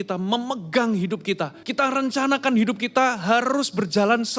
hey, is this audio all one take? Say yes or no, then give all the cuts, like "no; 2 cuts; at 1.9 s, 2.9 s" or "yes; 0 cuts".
no; 1 cut; at 1.6 s